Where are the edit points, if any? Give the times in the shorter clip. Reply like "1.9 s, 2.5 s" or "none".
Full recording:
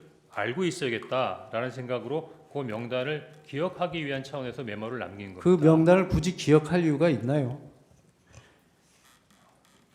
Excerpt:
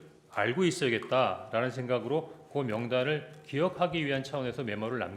none